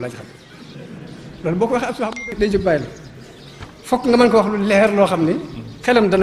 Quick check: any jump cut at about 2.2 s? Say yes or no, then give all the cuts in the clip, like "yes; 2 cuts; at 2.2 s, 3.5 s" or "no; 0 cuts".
yes; 1 cut; at 2.2 s